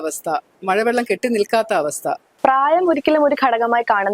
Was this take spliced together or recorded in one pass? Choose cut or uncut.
cut